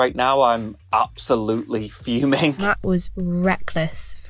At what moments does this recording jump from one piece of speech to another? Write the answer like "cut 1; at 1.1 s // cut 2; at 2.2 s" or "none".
cut 1; at 2.6 s